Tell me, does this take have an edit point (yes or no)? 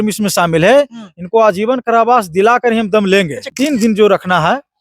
yes